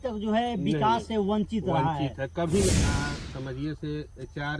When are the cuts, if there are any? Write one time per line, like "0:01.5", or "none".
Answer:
0:02.7